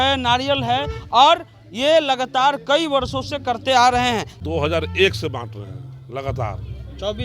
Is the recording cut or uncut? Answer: cut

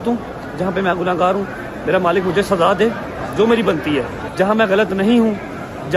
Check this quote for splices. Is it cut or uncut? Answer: cut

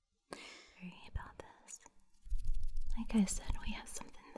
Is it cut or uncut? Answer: cut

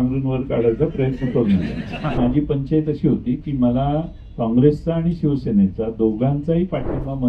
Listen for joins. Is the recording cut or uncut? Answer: cut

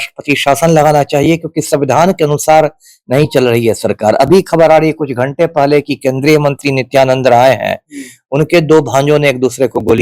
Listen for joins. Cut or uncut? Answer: uncut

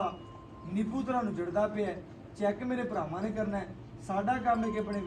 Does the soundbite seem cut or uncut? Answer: uncut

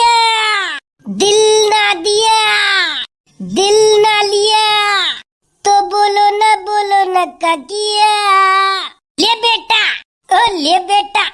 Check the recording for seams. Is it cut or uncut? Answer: uncut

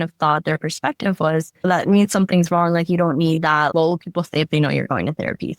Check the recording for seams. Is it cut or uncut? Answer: cut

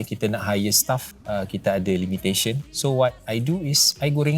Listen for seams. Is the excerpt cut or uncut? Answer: cut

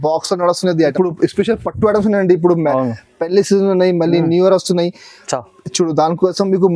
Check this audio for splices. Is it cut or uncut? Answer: cut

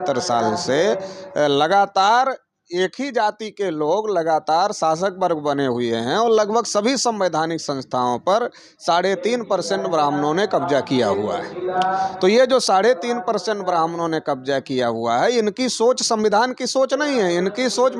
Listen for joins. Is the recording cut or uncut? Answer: uncut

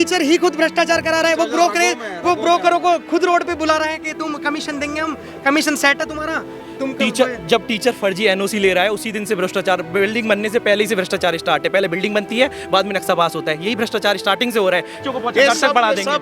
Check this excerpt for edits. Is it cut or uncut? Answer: cut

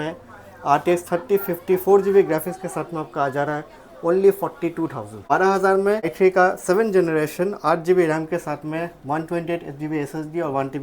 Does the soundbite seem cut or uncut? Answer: cut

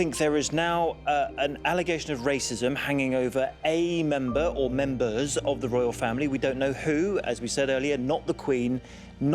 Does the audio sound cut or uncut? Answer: uncut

